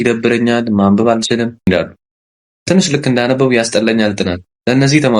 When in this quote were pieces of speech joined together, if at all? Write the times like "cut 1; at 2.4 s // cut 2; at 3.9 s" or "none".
cut 1; at 1.7 s